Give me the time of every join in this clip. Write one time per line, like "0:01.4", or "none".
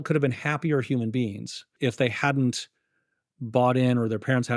0:01.6